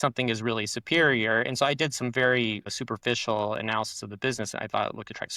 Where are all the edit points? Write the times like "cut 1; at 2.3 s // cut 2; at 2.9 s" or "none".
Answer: cut 1; at 2.7 s